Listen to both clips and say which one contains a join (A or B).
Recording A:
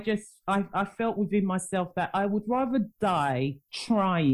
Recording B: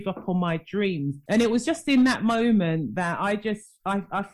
B